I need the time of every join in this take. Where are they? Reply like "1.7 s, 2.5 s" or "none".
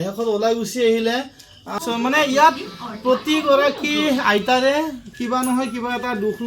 1.8 s